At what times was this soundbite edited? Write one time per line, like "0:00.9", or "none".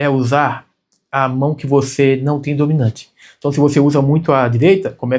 none